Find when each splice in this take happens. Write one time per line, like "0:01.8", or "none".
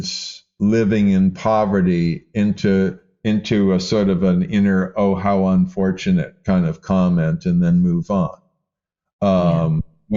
none

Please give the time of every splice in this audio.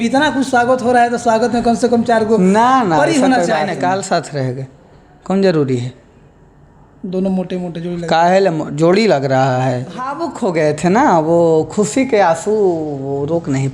0:03.7
0:10.2

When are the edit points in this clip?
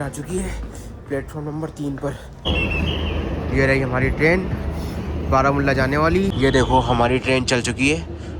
0:02.3
0:06.3

